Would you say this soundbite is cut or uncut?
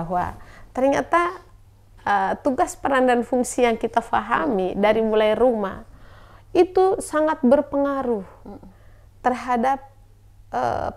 uncut